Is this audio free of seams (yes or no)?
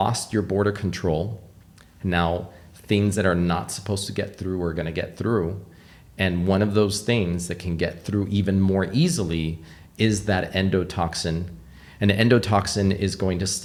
yes